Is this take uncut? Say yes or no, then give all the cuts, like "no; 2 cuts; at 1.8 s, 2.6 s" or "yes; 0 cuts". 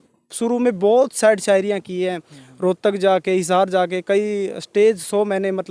yes; 0 cuts